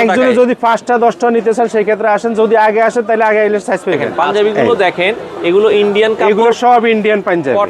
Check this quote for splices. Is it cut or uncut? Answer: cut